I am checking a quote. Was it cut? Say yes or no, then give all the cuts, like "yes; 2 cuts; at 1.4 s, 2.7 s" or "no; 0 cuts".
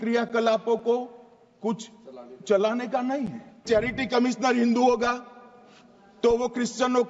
yes; 1 cut; at 3.6 s